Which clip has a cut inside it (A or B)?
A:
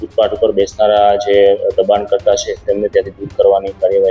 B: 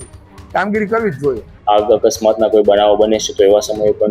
B